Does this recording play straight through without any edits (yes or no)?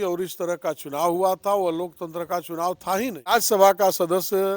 no